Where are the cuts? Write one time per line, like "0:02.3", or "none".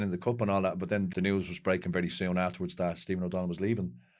0:01.1